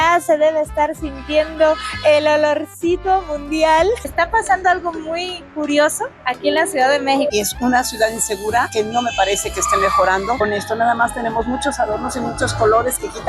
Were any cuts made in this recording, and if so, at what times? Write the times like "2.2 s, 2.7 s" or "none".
3.9 s, 7.3 s